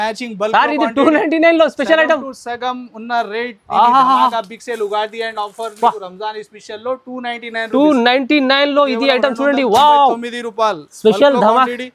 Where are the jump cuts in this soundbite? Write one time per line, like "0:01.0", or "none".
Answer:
none